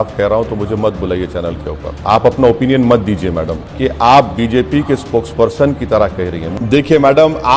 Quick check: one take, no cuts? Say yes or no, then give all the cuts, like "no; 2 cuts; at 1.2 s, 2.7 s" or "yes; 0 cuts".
no; 3 cuts; at 2.0 s, 3.6 s, 6.5 s